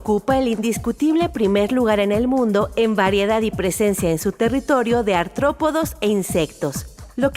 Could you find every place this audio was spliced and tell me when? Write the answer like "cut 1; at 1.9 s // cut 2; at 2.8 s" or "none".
cut 1; at 1.0 s